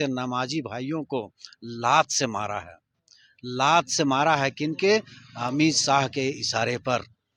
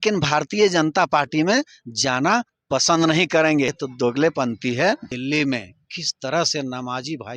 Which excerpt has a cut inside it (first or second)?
second